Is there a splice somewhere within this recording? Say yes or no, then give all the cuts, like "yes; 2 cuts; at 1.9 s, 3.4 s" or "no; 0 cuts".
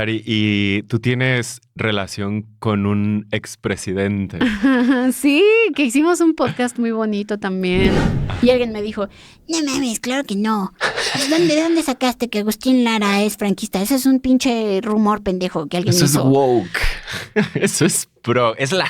yes; 1 cut; at 8.2 s